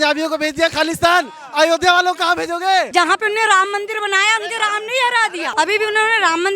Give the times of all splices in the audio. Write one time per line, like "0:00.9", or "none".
0:02.9
0:05.5